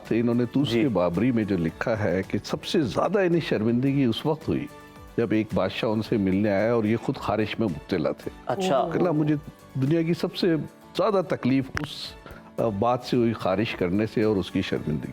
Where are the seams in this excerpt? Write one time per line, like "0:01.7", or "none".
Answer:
none